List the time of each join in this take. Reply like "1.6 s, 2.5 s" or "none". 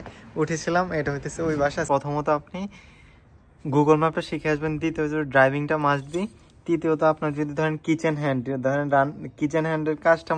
1.8 s